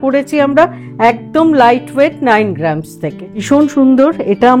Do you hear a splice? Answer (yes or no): yes